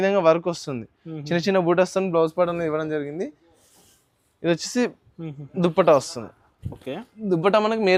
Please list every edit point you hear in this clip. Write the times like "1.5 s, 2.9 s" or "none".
none